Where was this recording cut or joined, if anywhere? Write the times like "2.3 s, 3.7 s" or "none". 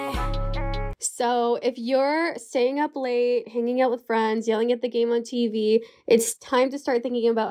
0.9 s